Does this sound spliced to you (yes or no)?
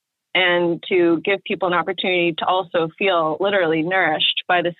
no